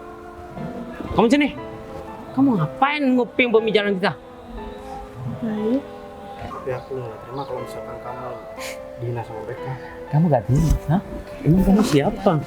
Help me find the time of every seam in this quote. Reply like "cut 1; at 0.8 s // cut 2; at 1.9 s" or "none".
cut 1; at 6.5 s